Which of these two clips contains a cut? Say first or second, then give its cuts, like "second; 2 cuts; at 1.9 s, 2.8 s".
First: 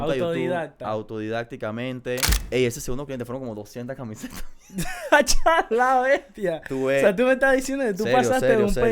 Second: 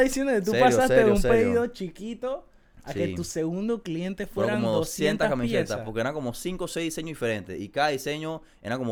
first; 1 cut; at 2.3 s